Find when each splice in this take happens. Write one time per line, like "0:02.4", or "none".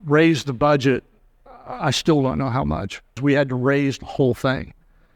0:03.2